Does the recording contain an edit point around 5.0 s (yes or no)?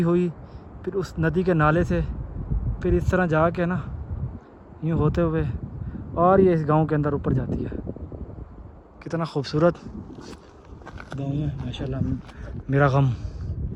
no